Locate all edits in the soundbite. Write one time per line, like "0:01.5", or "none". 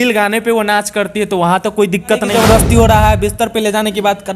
0:02.3